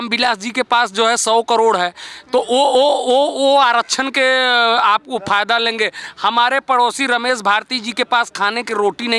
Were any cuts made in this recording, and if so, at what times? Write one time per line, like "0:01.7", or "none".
none